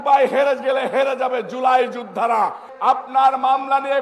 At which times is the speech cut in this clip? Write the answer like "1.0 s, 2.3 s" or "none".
2.7 s